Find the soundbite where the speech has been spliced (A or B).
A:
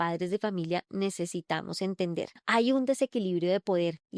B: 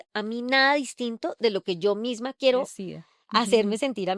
A